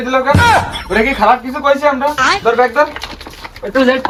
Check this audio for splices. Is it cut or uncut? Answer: uncut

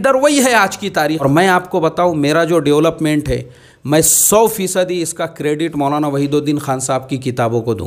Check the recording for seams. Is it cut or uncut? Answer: cut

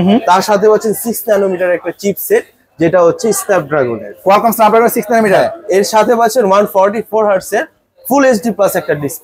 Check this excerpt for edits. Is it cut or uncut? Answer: uncut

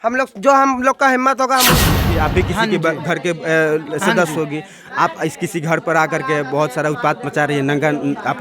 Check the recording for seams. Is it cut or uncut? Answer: cut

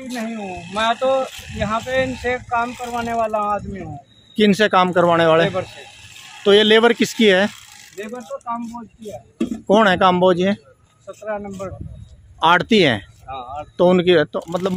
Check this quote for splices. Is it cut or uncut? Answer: uncut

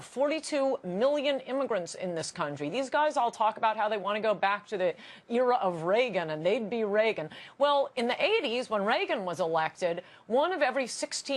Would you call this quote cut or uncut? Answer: uncut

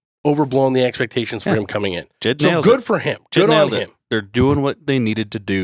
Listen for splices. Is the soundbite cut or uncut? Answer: uncut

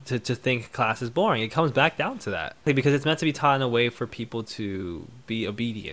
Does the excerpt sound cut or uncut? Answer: cut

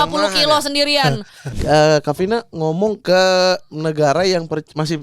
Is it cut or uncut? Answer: cut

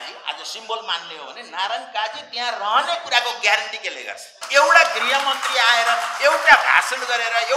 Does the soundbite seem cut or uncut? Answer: cut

